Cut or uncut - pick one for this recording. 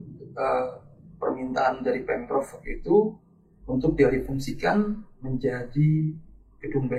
uncut